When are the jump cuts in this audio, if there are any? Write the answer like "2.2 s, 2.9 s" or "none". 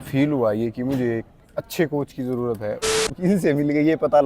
3.0 s